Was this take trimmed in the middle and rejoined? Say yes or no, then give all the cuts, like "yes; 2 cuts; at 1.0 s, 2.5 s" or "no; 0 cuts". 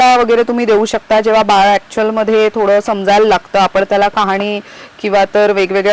no; 0 cuts